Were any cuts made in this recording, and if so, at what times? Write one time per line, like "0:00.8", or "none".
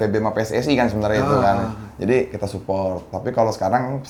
none